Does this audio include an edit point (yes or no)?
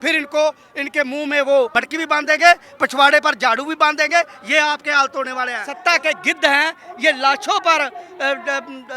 yes